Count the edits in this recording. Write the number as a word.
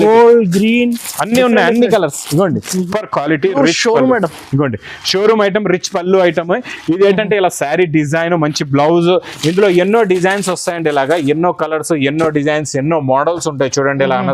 one